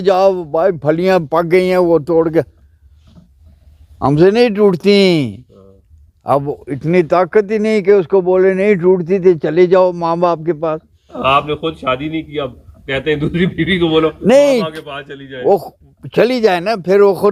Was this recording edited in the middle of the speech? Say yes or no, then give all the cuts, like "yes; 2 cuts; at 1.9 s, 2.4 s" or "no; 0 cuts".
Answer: no; 0 cuts